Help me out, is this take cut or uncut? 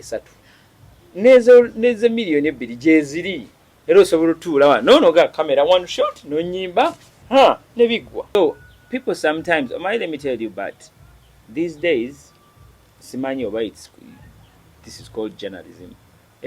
cut